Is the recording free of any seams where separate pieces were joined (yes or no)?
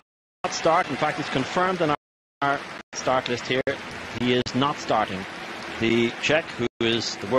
yes